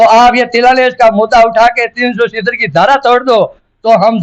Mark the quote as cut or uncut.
uncut